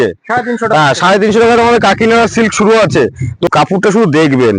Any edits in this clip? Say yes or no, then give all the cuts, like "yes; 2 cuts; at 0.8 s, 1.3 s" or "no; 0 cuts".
yes; 1 cut; at 3.5 s